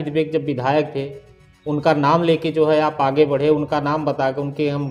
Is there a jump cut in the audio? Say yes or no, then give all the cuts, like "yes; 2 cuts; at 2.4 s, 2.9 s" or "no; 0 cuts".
no; 0 cuts